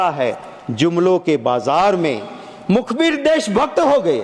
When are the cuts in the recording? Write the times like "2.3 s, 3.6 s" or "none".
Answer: none